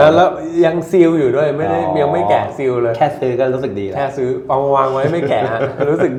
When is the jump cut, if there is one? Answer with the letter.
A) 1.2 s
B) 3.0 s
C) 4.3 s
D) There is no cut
D